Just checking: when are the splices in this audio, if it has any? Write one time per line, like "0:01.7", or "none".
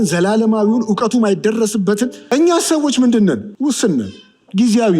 0:02.2
0:03.5